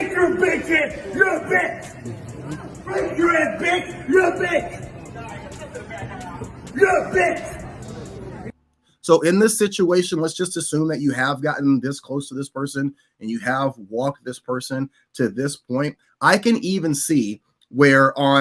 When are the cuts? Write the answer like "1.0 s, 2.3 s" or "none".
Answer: none

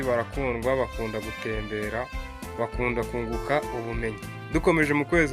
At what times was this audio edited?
4.3 s

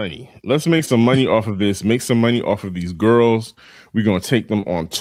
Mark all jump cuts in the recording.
none

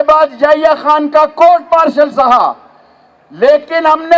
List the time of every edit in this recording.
none

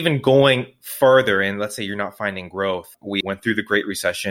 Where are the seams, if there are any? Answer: 3.0 s

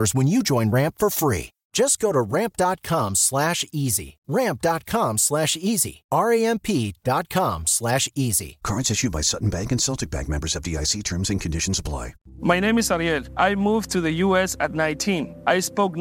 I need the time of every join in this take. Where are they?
12.2 s

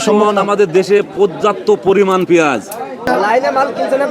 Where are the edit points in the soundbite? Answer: 3.0 s

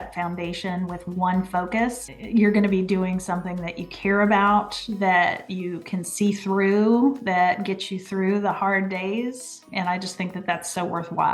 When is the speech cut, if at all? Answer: 2.1 s, 9.7 s

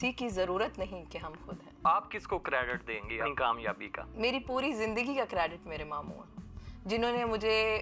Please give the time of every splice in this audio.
1.9 s, 3.2 s

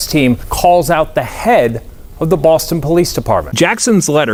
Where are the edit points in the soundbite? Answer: none

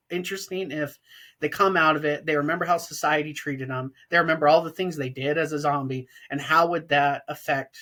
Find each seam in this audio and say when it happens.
none

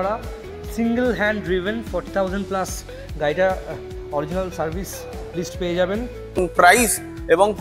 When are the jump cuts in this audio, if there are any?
6.4 s

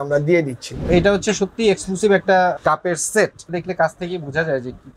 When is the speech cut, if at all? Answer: 0.9 s, 2.5 s, 3.6 s

